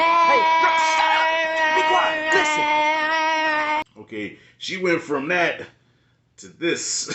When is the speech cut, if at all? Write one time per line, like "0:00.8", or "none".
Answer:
0:03.9